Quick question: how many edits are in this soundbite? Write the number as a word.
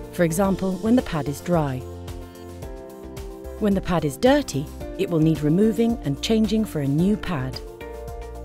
one